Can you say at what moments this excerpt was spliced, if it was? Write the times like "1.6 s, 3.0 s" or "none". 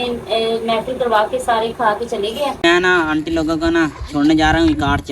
2.7 s